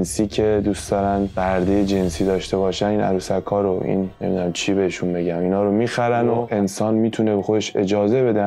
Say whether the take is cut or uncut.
cut